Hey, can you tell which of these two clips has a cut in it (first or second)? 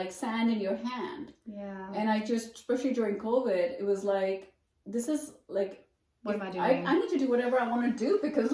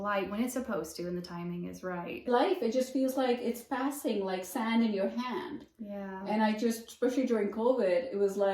second